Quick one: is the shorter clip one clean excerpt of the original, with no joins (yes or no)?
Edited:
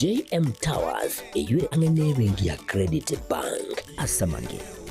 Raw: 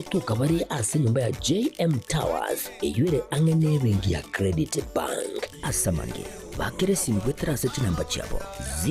no